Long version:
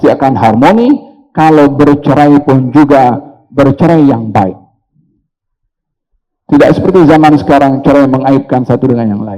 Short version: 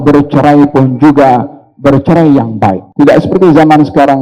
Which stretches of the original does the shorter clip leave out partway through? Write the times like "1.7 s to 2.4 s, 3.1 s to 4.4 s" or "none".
4.6 s to 6.4 s